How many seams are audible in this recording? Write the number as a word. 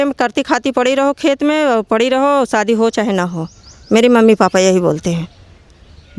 zero